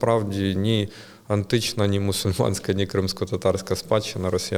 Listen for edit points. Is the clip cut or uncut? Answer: uncut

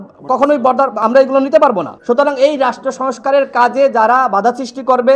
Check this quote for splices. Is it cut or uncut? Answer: cut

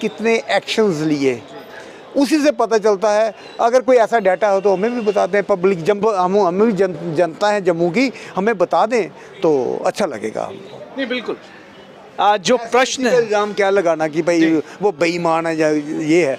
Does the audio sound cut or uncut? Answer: uncut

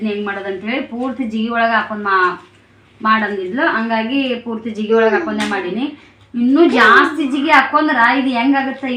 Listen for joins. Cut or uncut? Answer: uncut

